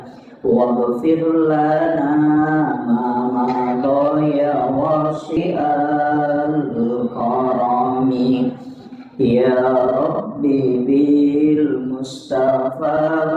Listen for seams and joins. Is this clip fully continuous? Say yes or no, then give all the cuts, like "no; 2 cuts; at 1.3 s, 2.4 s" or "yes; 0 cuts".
no; 1 cut; at 5.4 s